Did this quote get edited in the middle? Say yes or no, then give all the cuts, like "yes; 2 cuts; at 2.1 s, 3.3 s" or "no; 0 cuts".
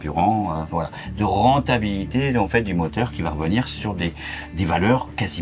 no; 0 cuts